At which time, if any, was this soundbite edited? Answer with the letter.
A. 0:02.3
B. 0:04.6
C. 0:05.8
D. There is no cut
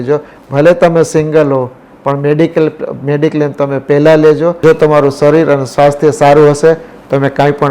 B